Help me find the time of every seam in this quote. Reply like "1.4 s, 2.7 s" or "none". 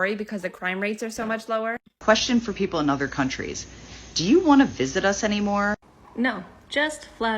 2.0 s